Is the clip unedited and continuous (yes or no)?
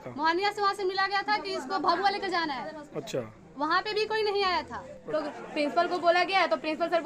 no